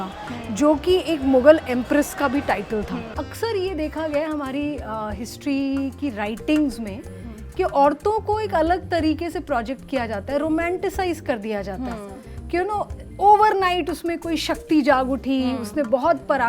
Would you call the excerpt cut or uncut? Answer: cut